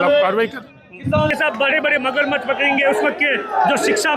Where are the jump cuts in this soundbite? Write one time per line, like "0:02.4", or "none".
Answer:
0:01.3